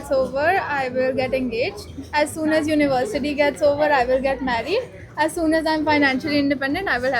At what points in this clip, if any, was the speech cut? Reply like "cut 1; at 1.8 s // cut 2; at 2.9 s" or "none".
none